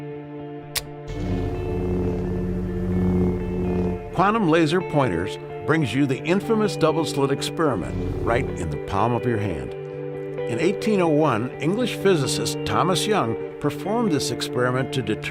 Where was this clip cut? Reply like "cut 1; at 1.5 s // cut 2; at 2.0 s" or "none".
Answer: none